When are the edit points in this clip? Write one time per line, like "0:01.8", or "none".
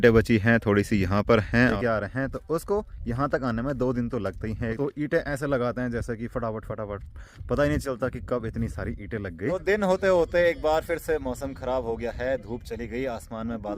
0:01.7
0:04.8
0:09.5